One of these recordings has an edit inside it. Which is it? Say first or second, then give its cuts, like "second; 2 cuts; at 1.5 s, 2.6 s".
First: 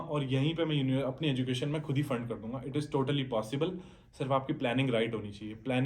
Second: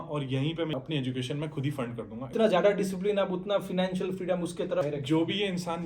second; 3 cuts; at 0.7 s, 2.2 s, 4.8 s